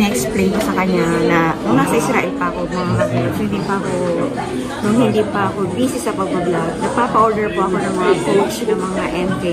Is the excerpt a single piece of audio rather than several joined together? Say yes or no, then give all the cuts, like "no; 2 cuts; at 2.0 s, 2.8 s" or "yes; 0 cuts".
yes; 0 cuts